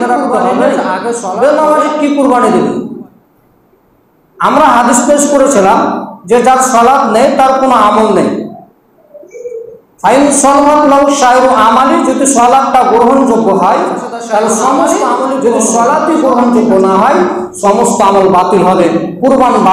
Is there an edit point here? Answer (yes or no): yes